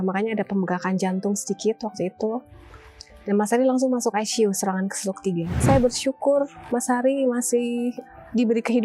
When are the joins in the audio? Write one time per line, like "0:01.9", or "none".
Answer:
0:05.6